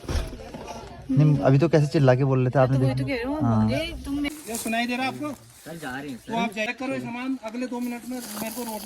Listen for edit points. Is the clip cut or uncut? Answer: cut